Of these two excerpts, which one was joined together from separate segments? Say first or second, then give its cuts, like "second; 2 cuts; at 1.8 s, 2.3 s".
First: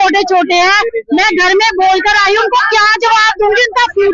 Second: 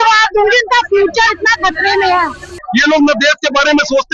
second; 1 cut; at 2.5 s